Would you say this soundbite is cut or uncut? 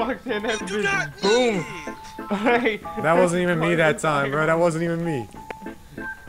uncut